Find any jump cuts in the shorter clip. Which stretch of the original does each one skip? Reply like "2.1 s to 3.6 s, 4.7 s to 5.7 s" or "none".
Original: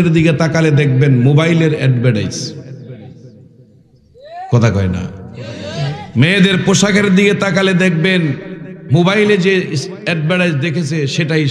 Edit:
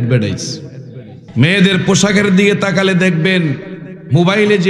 3.1 s to 6.0 s